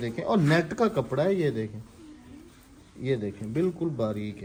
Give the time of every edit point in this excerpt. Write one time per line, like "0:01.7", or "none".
none

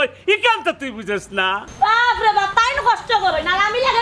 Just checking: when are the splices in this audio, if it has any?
none

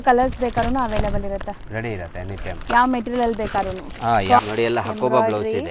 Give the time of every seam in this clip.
0:04.4

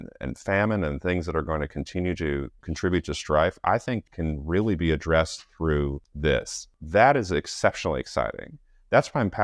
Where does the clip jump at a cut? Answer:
0:02.6
0:04.1
0:06.1
0:06.7

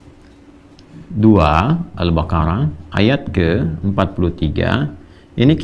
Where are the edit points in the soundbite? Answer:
none

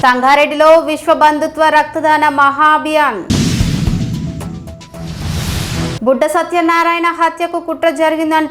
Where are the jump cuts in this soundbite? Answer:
none

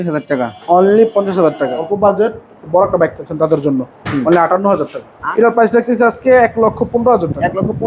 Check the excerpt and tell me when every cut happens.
0:01.7
0:05.1

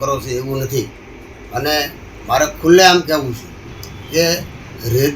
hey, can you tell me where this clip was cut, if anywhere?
none

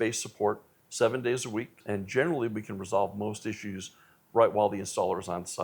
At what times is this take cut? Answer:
0:01.8

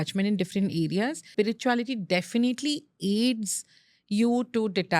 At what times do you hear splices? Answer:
0:01.2

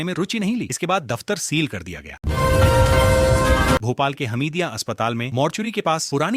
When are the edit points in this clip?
0:02.1
0:03.8

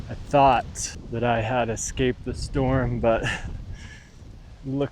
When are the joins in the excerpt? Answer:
0:01.0

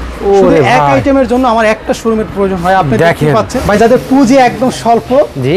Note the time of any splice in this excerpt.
0:03.7

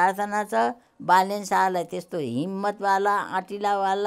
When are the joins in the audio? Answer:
none

